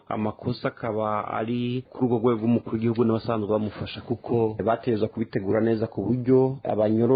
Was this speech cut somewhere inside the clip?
no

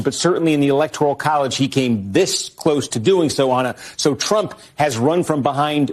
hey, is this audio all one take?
yes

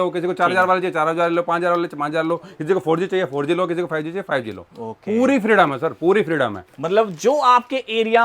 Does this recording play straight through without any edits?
yes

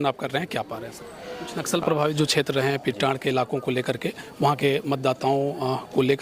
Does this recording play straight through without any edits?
no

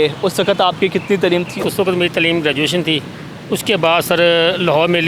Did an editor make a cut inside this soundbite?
yes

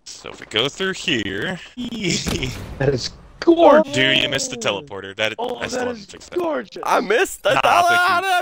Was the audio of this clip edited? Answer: yes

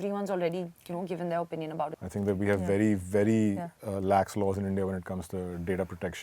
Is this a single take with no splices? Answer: no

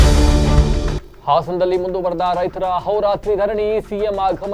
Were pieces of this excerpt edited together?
no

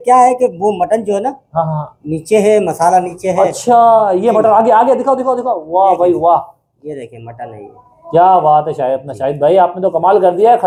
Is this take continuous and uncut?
yes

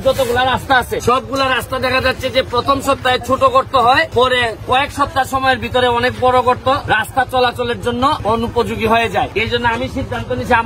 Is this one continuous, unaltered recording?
no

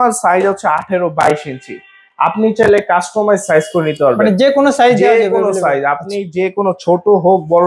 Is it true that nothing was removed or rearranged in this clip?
yes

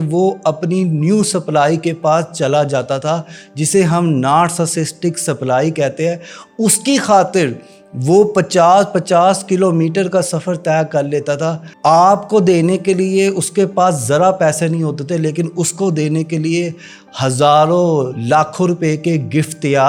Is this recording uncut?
yes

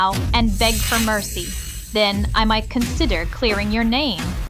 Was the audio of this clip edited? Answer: no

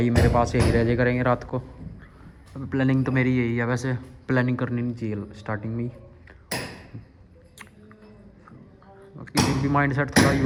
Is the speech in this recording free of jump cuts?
yes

